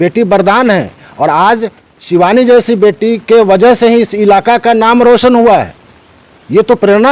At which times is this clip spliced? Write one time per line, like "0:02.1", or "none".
none